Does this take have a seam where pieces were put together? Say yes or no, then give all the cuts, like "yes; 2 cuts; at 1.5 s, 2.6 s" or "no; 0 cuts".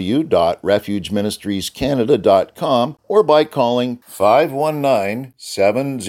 yes; 1 cut; at 3.0 s